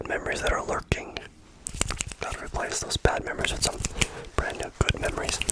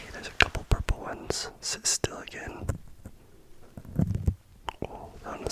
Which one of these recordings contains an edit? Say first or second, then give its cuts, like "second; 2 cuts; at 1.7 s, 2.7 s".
first; 1 cut; at 1.7 s